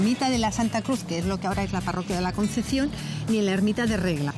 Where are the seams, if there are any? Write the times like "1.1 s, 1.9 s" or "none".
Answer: none